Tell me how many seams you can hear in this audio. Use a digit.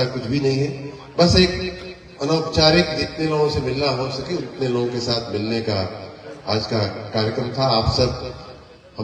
0